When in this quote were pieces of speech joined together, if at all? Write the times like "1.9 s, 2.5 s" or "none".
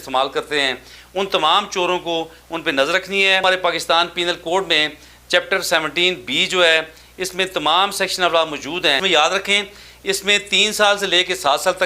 3.4 s, 9.0 s